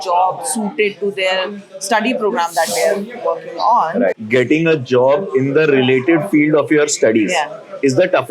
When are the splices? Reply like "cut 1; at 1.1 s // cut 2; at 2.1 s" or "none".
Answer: cut 1; at 4.2 s

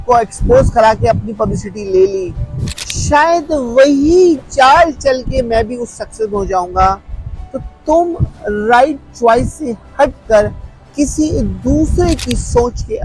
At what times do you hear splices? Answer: none

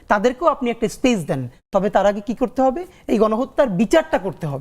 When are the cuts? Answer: none

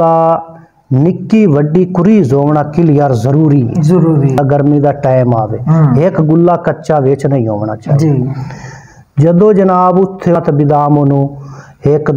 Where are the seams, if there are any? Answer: cut 1; at 4.4 s // cut 2; at 10.4 s

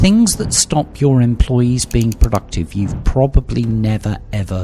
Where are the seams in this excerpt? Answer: none

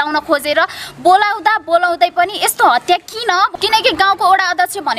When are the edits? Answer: cut 1; at 3.5 s

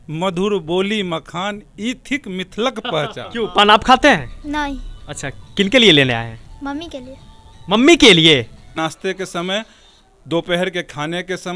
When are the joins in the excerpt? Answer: cut 1; at 3.2 s // cut 2; at 8.8 s

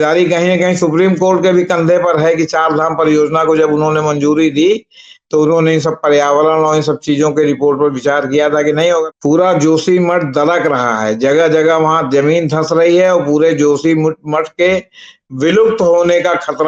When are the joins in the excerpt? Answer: cut 1; at 9.1 s

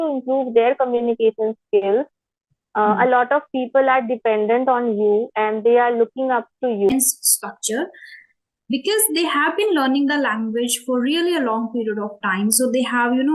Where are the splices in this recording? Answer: cut 1; at 6.9 s

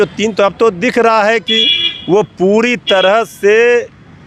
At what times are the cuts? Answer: none

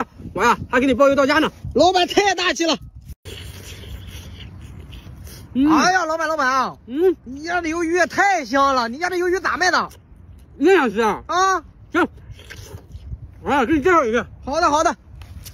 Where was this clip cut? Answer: cut 1; at 2.9 s

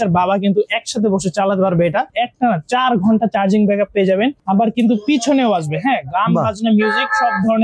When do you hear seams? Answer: cut 1; at 2.1 s // cut 2; at 4.4 s

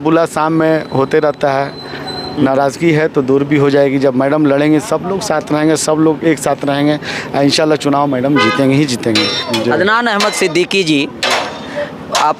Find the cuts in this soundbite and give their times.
cut 1; at 9.3 s

